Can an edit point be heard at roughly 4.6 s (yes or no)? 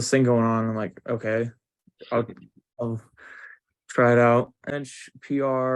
yes